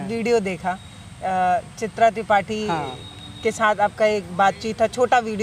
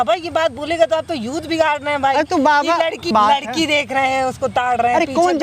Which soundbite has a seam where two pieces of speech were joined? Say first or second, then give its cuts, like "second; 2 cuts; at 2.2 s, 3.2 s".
second; 1 cut; at 3.1 s